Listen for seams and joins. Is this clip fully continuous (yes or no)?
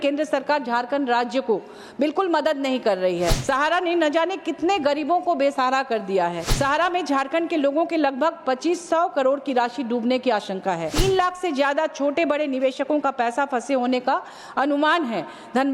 no